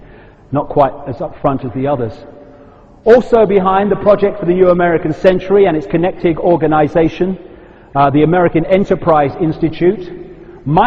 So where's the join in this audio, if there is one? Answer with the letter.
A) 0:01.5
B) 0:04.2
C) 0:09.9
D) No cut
B